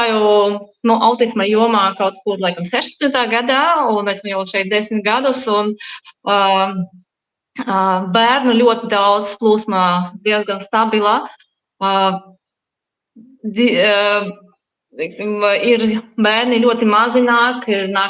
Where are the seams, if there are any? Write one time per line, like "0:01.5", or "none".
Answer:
none